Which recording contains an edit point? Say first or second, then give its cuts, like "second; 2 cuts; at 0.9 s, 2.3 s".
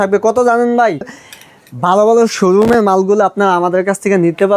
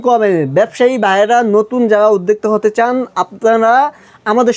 first; 1 cut; at 1.1 s